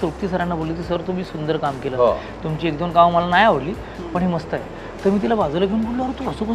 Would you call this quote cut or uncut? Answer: uncut